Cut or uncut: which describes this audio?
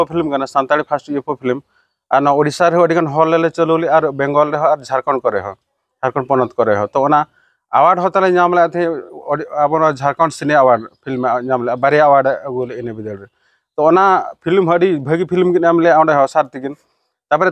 uncut